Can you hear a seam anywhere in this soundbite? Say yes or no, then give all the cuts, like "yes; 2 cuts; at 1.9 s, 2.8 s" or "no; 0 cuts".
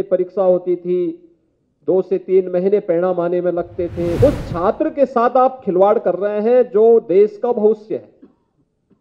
yes; 1 cut; at 4.2 s